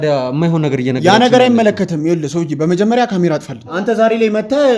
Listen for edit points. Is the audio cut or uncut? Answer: cut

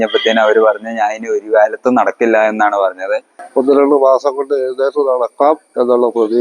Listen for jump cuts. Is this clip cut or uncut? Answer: cut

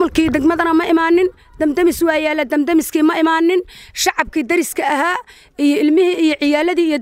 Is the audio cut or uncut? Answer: uncut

